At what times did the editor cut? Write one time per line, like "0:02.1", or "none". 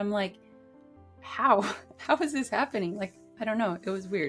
none